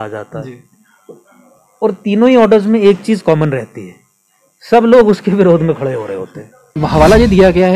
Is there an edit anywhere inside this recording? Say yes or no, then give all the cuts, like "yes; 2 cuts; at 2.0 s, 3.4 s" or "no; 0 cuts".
yes; 1 cut; at 6.8 s